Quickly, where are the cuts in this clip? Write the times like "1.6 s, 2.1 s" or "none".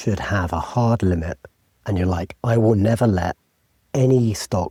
none